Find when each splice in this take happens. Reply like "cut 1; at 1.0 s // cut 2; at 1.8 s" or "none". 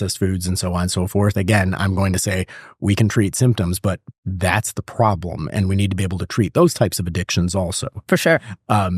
none